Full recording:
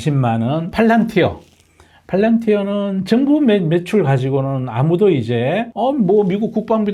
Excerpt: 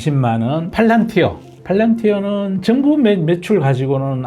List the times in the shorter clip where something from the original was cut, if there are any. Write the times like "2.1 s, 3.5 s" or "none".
1.5 s